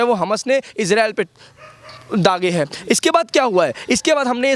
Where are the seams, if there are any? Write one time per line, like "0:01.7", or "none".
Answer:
none